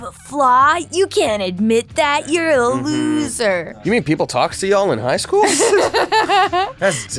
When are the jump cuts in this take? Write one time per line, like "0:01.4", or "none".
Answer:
0:03.7